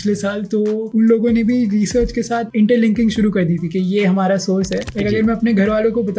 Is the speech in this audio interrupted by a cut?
yes; 1 cut; at 4.8 s

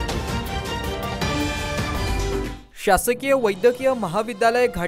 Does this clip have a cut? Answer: yes; 1 cut; at 2.5 s

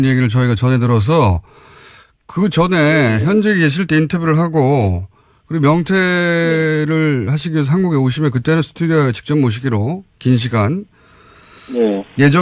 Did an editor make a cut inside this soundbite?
yes; 1 cut; at 10.6 s

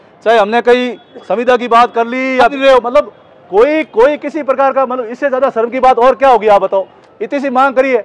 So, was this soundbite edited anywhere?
yes; 1 cut; at 2.5 s

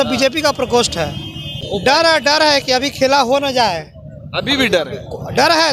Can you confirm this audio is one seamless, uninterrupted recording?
no; 1 cut; at 1.9 s

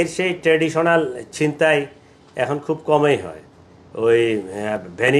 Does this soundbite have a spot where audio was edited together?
no; 0 cuts

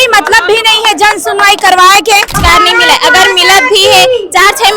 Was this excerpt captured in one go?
no; 1 cut; at 2.4 s

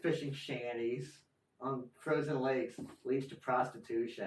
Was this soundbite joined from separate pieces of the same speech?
no; 0 cuts

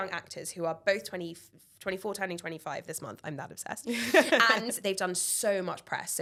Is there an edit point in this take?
no; 0 cuts

